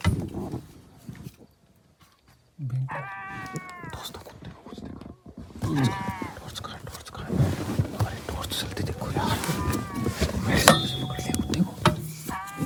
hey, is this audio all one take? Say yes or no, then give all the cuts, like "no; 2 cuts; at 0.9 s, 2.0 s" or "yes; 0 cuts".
yes; 0 cuts